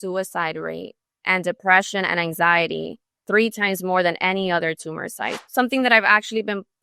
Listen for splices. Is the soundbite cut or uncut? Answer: cut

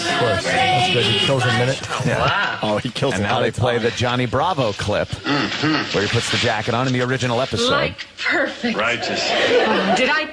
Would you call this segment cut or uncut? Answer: uncut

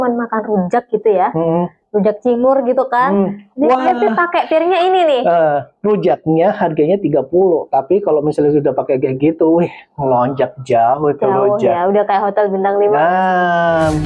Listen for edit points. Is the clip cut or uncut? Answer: uncut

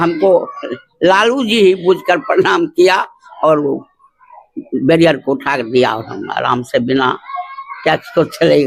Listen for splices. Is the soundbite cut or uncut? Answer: uncut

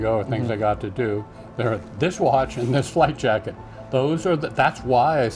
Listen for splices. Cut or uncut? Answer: uncut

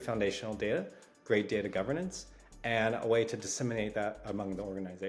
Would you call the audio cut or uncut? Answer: uncut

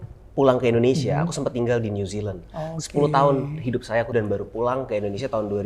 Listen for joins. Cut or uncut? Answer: cut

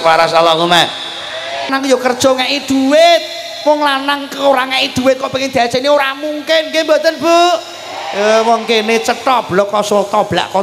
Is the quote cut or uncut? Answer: cut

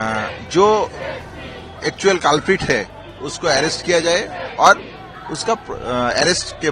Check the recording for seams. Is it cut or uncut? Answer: uncut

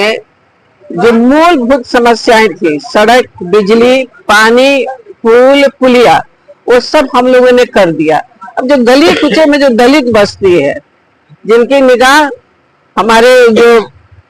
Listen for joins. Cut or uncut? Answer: uncut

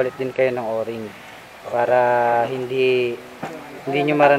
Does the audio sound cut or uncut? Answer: uncut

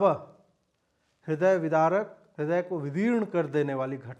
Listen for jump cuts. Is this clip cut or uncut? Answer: cut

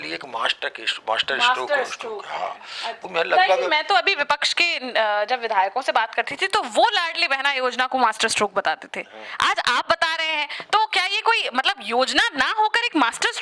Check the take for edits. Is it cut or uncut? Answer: cut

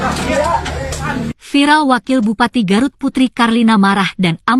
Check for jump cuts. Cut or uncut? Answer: uncut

